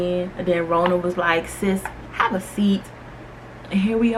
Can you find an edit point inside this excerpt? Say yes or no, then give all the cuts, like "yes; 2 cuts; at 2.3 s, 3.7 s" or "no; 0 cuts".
no; 0 cuts